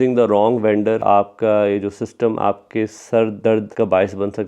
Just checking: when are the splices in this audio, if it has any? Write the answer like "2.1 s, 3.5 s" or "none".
1.0 s, 3.7 s